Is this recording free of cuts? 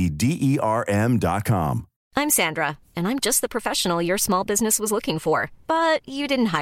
no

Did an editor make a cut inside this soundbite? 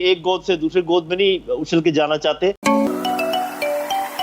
yes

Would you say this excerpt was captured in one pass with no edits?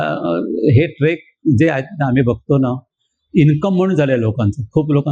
yes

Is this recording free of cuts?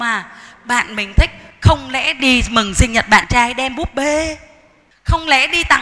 yes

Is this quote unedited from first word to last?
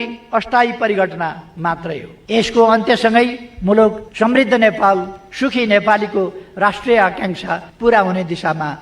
no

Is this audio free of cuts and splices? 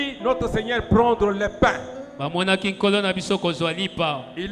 yes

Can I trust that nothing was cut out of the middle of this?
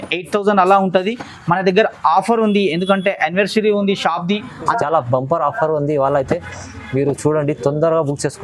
no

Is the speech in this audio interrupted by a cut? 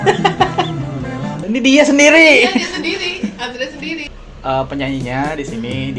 yes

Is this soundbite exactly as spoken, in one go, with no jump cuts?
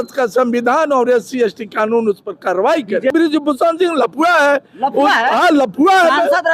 no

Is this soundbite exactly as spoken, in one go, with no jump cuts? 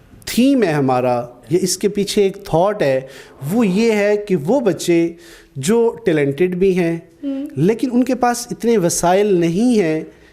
yes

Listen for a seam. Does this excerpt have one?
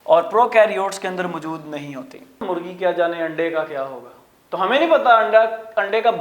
yes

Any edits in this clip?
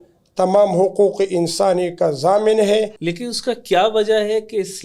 yes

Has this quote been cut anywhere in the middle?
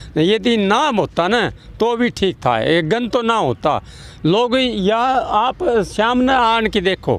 no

